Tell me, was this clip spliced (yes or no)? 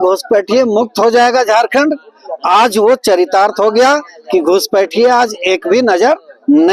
no